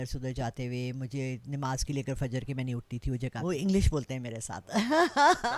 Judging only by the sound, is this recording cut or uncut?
cut